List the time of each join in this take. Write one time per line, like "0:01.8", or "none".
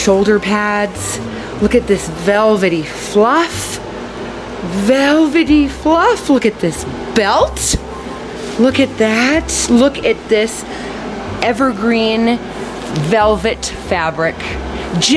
none